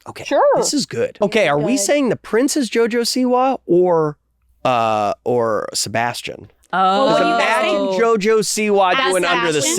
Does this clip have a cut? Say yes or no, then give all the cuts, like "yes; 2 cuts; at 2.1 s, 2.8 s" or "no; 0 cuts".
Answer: yes; 1 cut; at 1.1 s